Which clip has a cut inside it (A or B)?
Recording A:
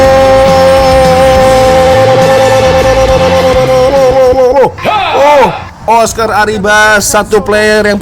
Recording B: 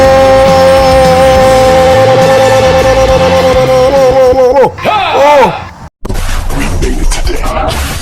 B